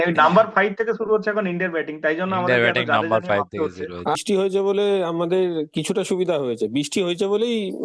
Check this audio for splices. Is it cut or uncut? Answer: cut